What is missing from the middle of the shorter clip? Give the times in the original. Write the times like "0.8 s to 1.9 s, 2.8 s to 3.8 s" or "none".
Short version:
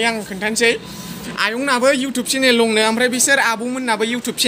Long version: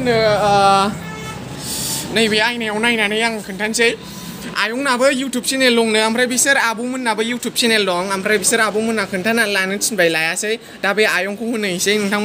none